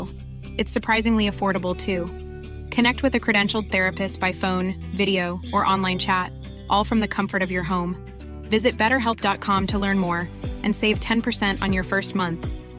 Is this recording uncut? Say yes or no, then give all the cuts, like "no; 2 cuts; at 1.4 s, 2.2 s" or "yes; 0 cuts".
yes; 0 cuts